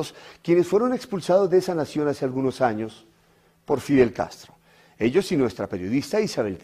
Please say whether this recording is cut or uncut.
uncut